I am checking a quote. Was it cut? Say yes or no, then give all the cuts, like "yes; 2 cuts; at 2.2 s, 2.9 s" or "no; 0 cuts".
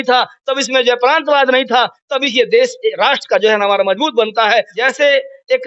yes; 1 cut; at 4.7 s